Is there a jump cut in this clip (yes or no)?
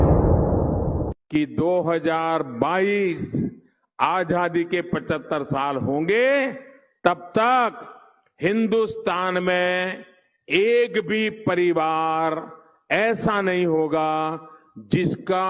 yes